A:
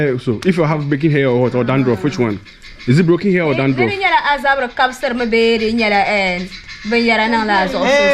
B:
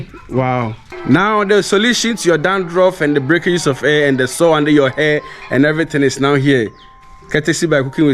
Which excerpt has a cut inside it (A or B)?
B